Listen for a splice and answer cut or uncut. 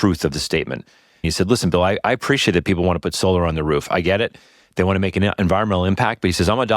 cut